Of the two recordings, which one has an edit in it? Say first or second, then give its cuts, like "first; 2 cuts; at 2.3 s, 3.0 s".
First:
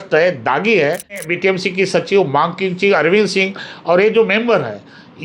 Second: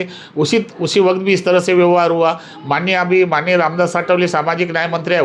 first; 1 cut; at 1.2 s